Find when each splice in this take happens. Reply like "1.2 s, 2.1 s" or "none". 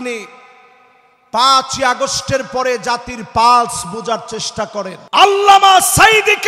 5.0 s